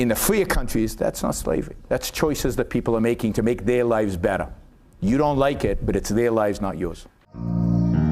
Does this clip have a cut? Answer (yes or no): yes